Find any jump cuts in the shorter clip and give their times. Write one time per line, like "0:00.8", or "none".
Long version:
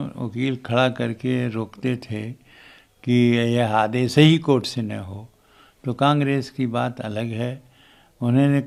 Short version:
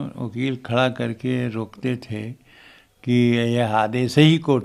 none

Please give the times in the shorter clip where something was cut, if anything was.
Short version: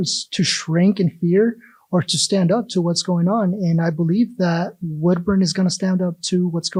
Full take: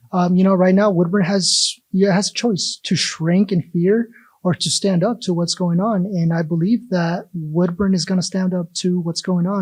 none

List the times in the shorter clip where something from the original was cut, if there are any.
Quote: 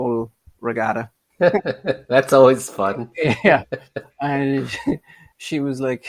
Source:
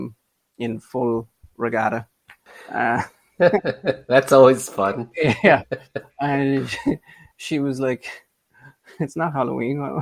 0:01.2

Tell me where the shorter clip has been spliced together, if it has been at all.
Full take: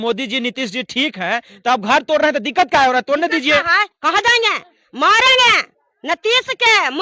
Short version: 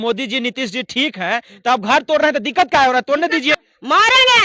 0:03.5

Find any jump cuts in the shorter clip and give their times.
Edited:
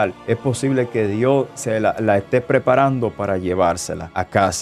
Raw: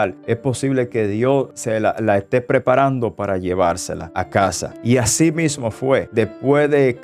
none

